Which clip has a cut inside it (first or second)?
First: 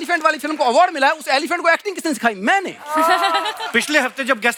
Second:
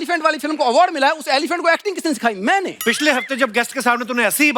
second